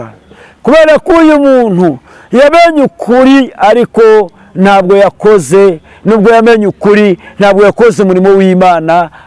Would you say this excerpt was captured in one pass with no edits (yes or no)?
yes